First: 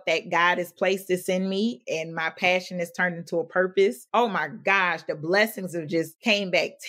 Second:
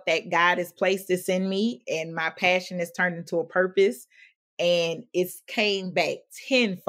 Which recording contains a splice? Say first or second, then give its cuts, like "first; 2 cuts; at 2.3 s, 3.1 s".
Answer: first; 1 cut; at 4.0 s